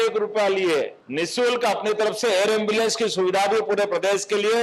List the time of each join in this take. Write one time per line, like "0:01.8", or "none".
0:01.0